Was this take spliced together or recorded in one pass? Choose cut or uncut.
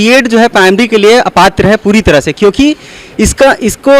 uncut